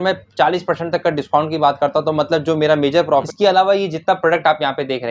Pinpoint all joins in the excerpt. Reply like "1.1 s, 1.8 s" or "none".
3.3 s